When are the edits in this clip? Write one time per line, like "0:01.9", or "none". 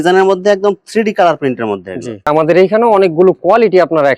0:02.3